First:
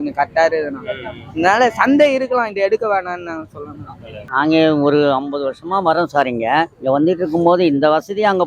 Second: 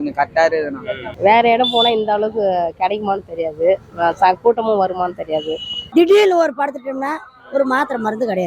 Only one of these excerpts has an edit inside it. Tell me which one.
second; 2 cuts; at 1.1 s, 5.7 s

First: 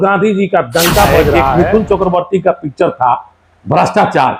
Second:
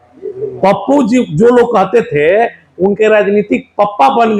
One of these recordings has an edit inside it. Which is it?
first; 1 cut; at 1.5 s

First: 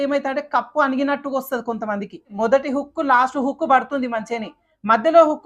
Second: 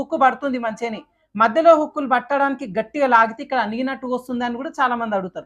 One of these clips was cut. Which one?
first; 1 cut; at 2.3 s

